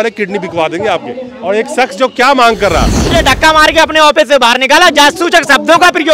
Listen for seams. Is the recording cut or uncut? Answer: cut